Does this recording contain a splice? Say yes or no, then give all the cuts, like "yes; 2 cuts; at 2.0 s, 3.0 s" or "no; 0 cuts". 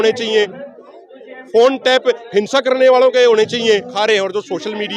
yes; 1 cut; at 3.9 s